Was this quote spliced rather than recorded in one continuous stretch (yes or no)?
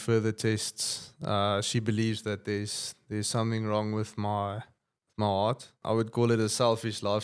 yes